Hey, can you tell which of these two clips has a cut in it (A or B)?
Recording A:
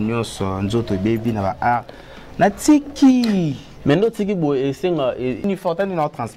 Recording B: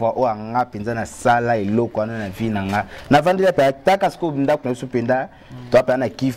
A